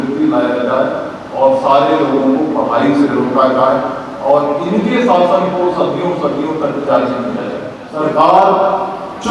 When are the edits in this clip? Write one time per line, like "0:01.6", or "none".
0:07.8